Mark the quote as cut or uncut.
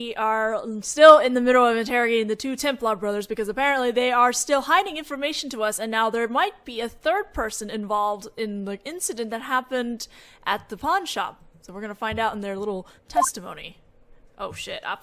uncut